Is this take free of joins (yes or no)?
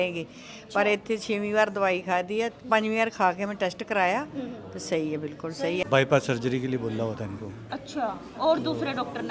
no